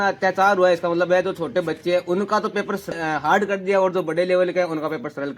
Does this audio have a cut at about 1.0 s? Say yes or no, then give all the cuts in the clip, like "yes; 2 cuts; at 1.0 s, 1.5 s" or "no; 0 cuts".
no; 1 cut; at 2.9 s